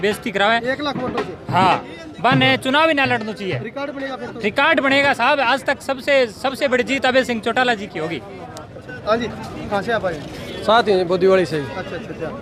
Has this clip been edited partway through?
no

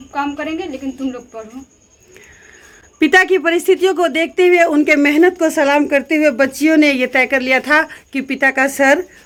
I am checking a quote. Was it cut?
no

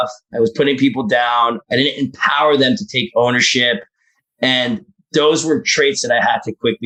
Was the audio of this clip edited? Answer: no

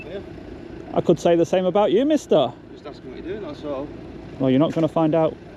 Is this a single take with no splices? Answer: yes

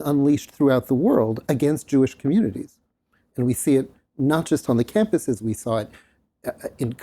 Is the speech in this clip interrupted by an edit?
no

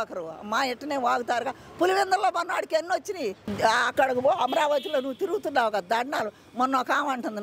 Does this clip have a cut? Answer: yes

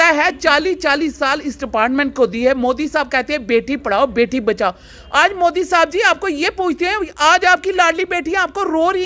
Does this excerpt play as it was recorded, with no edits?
yes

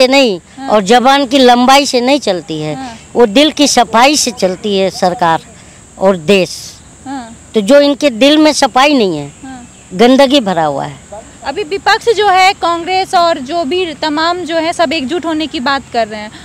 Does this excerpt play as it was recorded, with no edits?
yes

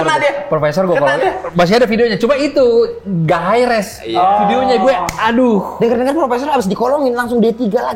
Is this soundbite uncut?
yes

